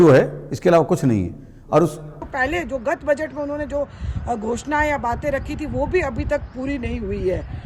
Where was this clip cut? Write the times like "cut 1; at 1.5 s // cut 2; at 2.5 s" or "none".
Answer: cut 1; at 2.2 s